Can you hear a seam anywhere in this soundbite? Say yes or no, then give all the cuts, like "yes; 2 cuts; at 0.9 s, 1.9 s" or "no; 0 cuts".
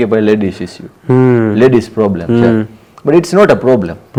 no; 0 cuts